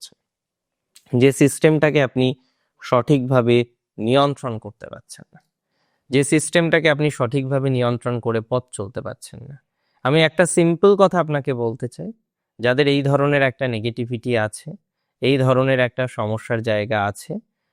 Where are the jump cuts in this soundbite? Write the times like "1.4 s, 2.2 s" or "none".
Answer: none